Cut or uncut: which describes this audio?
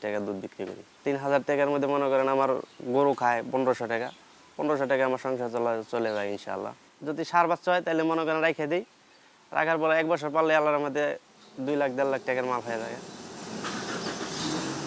uncut